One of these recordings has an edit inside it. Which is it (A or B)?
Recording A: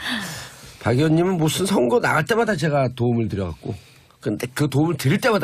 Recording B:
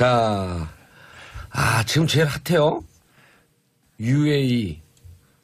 A